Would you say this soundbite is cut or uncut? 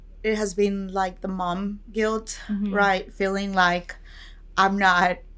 uncut